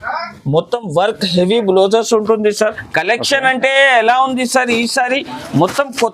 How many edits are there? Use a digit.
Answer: 1